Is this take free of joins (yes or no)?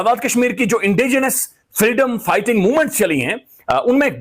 yes